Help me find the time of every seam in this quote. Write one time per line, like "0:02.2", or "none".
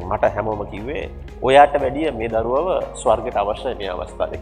none